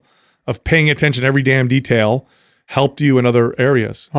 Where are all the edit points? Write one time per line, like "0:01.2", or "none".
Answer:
none